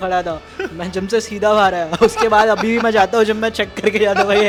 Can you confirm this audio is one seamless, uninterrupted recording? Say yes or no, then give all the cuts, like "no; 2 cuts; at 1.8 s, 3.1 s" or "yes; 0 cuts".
yes; 0 cuts